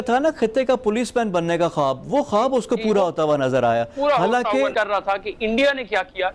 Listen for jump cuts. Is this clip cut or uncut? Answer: cut